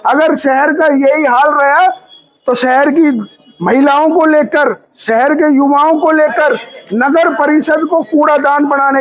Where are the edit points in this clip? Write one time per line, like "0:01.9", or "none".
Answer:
none